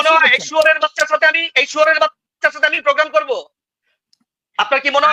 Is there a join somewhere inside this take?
no; 0 cuts

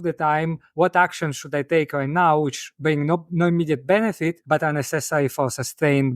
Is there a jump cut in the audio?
yes; 2 cuts; at 2.6 s, 4.4 s

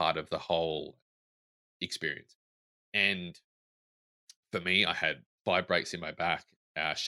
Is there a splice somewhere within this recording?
no; 0 cuts

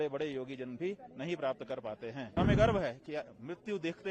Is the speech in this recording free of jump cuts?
no; 1 cut; at 2.4 s

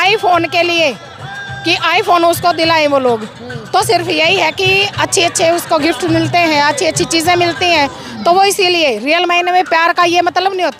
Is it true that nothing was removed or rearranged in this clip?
yes; 0 cuts

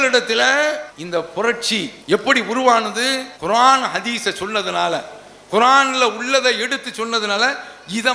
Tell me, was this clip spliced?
yes; 2 cuts; at 1.9 s, 3.3 s

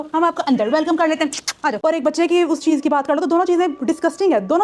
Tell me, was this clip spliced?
yes; 1 cut; at 1.8 s

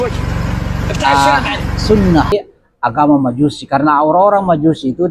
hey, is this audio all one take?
no; 1 cut; at 2.3 s

